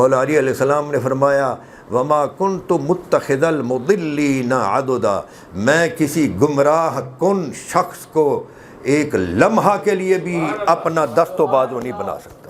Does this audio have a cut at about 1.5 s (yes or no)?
no